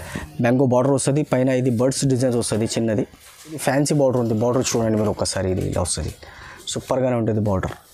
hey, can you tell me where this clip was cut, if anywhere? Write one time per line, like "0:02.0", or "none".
0:03.6